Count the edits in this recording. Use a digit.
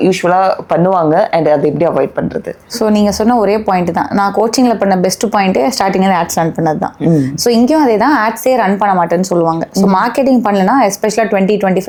0